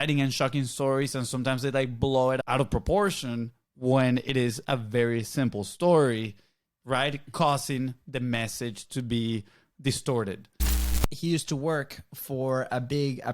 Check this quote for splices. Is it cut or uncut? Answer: cut